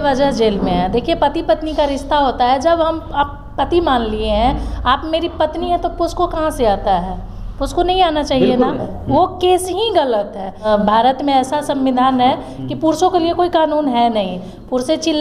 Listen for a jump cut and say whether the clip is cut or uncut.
cut